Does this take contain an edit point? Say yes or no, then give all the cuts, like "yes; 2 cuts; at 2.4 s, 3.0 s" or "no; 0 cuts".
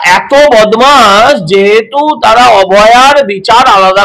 no; 0 cuts